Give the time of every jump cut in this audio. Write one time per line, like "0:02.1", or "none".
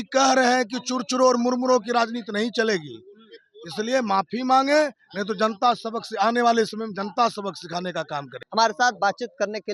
none